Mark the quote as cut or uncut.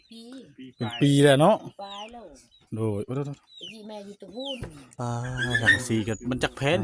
cut